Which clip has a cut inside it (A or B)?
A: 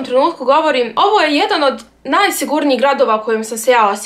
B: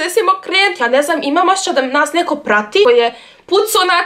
B